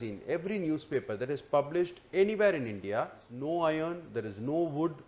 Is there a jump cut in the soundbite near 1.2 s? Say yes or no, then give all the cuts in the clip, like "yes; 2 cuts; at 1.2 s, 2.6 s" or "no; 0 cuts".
no; 1 cut; at 3.4 s